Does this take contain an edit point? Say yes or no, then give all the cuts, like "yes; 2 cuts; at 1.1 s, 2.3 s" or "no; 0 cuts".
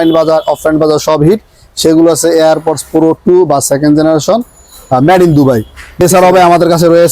yes; 1 cut; at 6.0 s